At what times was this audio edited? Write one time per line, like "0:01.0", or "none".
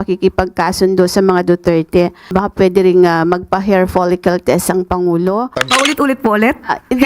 0:05.5